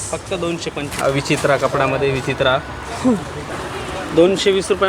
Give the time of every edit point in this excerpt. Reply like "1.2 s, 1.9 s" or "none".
0.9 s, 3.5 s